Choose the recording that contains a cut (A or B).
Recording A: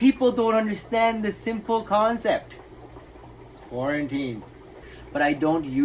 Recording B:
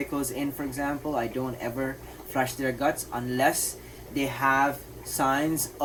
A